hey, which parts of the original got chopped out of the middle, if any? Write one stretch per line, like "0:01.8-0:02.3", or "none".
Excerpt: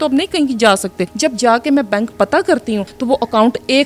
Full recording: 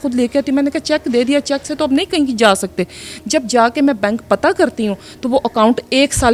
0:02.8-0:03.2
0:05.0-0:05.1